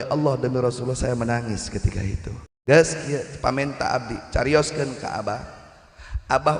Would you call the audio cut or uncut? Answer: cut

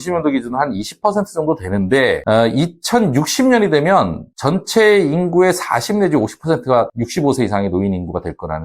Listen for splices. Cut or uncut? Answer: cut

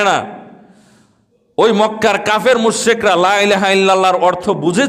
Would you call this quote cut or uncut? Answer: uncut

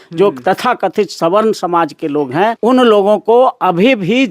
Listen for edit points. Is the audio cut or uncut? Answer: cut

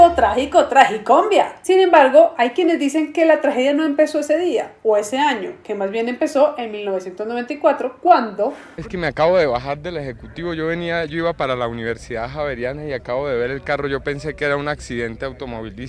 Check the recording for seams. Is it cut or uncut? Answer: uncut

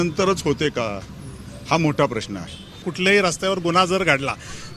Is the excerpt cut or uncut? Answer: cut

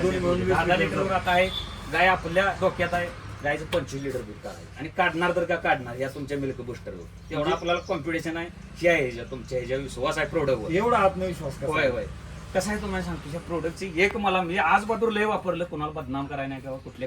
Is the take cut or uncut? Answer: uncut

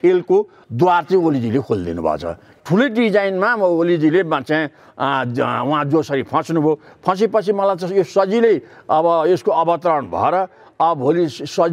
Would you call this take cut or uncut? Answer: cut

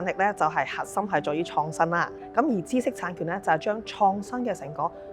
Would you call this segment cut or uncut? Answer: cut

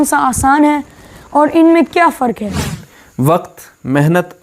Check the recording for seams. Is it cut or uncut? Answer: cut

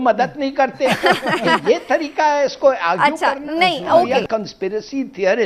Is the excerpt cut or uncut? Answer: uncut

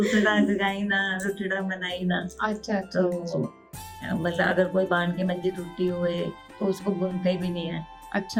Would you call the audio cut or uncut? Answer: uncut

